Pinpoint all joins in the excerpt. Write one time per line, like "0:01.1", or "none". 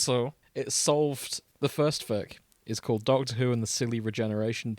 0:01.4

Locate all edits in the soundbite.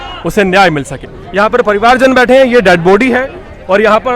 0:01.6

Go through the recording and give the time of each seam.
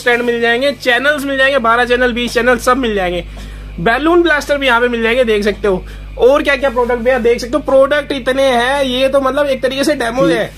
none

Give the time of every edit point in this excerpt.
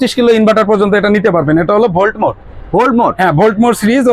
none

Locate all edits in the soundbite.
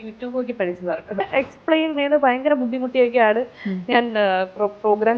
0:01.2

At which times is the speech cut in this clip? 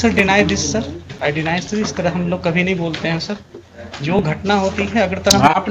0:01.1

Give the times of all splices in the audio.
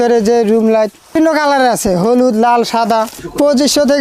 0:01.2
0:03.1

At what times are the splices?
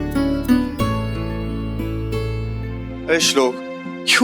0:02.8

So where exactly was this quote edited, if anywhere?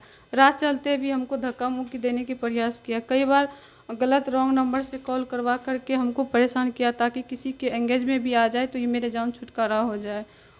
none

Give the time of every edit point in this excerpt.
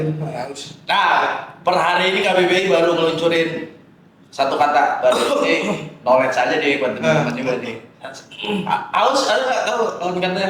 none

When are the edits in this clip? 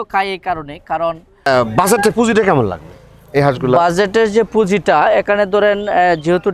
0:01.3

